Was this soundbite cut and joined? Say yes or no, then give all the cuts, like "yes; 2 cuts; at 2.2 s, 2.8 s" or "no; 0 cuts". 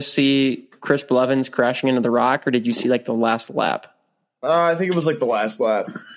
no; 0 cuts